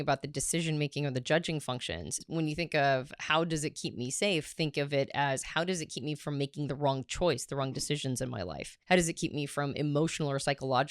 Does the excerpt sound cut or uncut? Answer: cut